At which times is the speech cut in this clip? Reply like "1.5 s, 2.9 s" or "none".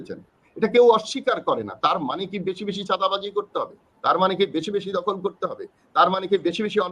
none

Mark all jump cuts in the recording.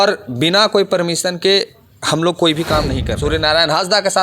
3.0 s

